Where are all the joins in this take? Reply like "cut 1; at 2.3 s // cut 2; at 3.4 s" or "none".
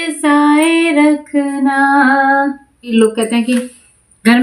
cut 1; at 2.9 s

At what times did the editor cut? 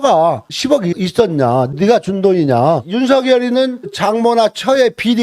cut 1; at 2.9 s // cut 2; at 3.9 s

